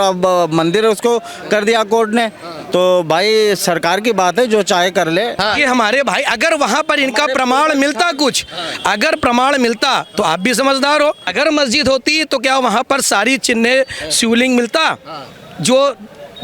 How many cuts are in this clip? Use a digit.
2